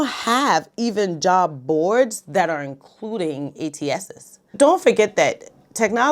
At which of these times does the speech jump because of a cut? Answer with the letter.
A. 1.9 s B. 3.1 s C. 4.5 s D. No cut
C